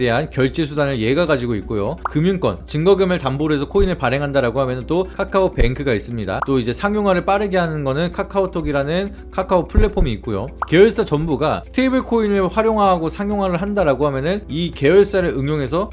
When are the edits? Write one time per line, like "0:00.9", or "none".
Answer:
none